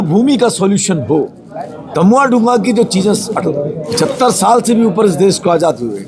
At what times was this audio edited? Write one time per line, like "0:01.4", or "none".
none